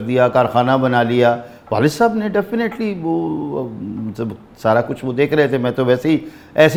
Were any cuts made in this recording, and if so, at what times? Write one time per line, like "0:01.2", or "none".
none

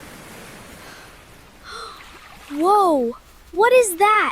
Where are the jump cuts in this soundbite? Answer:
0:00.9

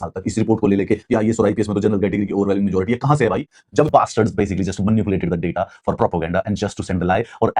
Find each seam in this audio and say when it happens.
0:03.9

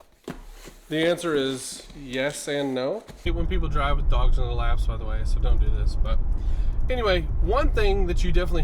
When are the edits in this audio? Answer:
0:03.1

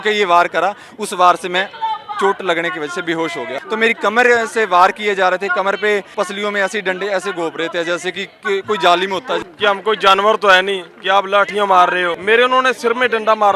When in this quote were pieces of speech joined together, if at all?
0:03.6
0:06.1
0:09.4
0:12.1

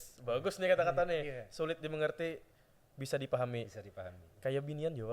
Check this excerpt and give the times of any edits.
none

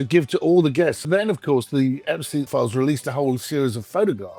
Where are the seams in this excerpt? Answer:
0:01.1
0:02.5

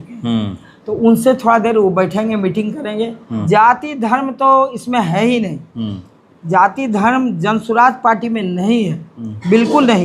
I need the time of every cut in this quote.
0:03.4

